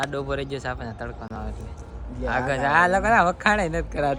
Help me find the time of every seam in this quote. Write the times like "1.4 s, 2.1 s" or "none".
none